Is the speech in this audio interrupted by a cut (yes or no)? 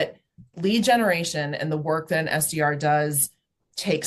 no